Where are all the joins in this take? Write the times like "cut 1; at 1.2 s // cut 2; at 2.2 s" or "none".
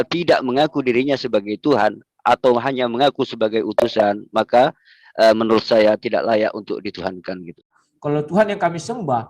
cut 1; at 7.8 s